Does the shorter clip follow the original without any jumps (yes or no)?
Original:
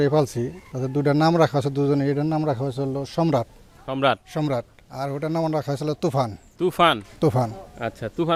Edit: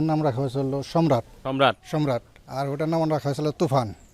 no